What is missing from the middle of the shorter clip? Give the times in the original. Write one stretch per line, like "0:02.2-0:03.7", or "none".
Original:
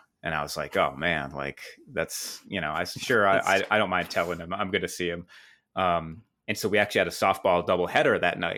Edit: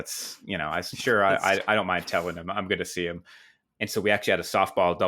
0:05.6-0:06.2